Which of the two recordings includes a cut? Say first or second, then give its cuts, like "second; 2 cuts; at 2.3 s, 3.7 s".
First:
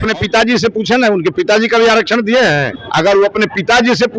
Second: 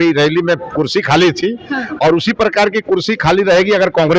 first; 1 cut; at 2.8 s